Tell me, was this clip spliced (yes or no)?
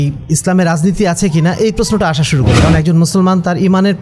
yes